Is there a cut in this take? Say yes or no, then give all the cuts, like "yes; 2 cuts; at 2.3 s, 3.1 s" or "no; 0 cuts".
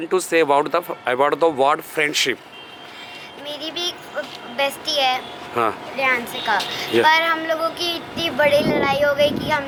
no; 0 cuts